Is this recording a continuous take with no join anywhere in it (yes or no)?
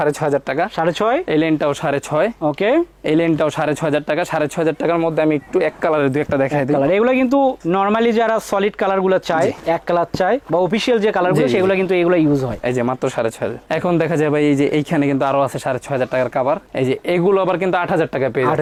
yes